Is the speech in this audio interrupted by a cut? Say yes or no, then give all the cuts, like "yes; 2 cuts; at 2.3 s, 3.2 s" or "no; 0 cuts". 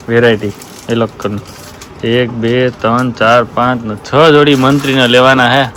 no; 0 cuts